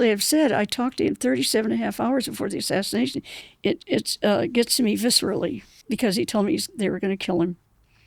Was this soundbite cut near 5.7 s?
yes; 2 cuts; at 3.3 s, 5.7 s

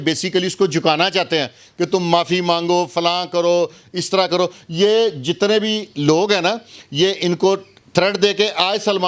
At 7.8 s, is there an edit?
no; 0 cuts

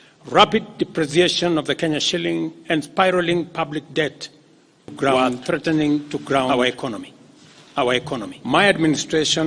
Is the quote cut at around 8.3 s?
yes; 1 cut; at 8.3 s

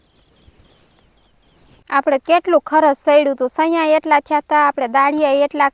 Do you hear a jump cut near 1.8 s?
yes; 1 cut; at 1.8 s

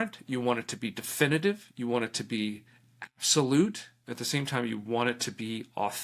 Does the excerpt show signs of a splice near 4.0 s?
yes; 1 cut; at 4.0 s

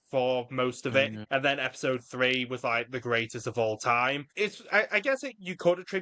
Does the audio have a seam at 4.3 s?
yes; 2 cuts; at 1.2 s, 4.3 s

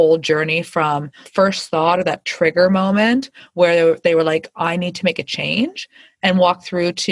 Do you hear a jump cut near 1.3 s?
yes; 1 cut; at 1.3 s

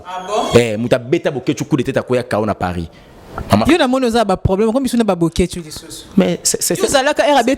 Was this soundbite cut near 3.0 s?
no; 0 cuts

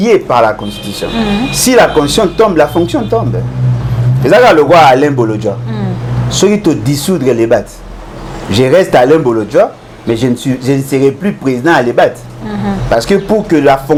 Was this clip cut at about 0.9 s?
no; 0 cuts

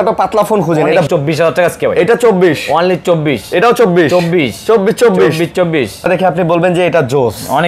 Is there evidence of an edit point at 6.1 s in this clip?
yes; 2 cuts; at 1.1 s, 6.1 s

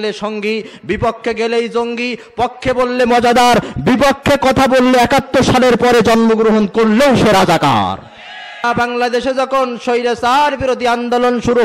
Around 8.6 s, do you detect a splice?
yes; 1 cut; at 8.6 s

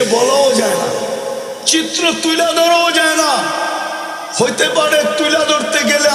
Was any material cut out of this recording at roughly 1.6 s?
yes; 1 cut; at 1.6 s

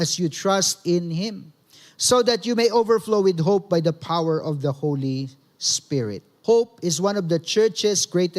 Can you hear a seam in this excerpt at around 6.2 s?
yes; 1 cut; at 6.2 s

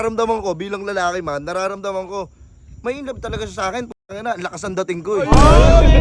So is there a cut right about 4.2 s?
no; 0 cuts

